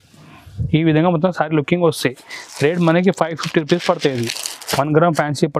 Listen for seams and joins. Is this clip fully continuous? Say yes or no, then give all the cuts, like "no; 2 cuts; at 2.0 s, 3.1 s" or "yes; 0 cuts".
yes; 0 cuts